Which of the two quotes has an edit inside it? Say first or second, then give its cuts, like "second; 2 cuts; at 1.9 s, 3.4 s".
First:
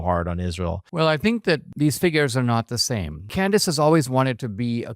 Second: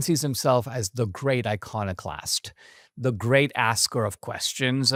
first; 3 cuts; at 0.8 s, 1.7 s, 3.2 s